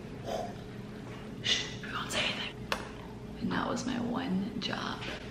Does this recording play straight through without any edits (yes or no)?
no